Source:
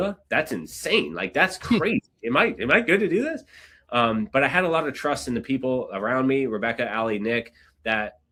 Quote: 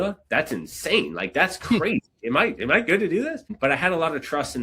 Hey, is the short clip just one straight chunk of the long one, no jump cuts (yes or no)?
no